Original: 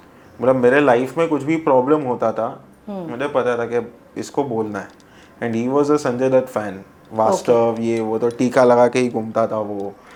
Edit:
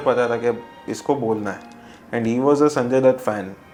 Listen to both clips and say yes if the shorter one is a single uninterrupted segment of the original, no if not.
yes